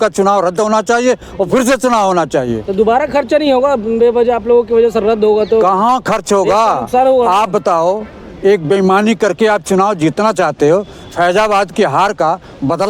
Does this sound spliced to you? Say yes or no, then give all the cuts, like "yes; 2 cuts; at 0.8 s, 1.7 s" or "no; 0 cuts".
no; 0 cuts